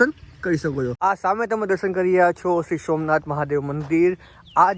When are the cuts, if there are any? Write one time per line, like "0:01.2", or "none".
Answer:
0:00.9